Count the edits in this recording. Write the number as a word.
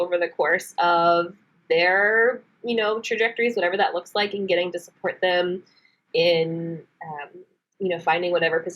zero